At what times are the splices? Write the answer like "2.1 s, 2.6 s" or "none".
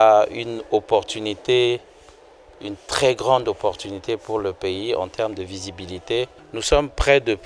6.4 s